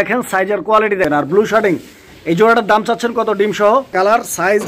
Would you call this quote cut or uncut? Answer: cut